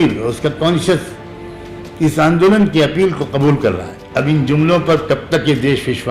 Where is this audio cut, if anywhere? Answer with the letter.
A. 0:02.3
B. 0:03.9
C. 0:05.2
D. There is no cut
B